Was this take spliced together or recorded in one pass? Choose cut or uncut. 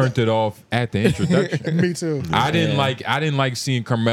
uncut